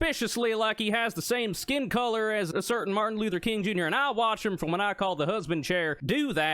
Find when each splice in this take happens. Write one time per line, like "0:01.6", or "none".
none